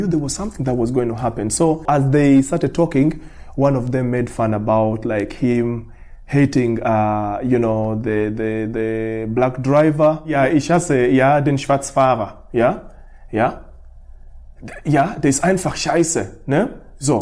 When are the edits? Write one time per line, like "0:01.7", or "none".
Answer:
0:01.8